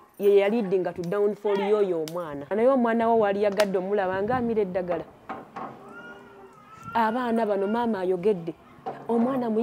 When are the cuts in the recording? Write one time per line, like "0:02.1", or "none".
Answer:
0:02.5